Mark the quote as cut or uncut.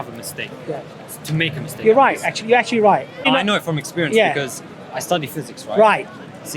cut